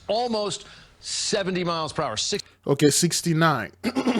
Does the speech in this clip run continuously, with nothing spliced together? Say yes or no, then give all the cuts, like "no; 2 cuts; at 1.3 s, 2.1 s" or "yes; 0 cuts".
yes; 0 cuts